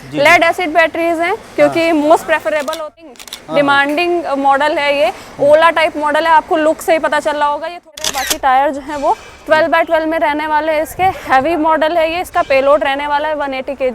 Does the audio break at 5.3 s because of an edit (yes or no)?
no